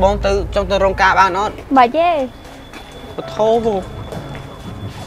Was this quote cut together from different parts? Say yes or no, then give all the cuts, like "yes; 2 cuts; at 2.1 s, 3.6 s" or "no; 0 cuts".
yes; 1 cut; at 1.6 s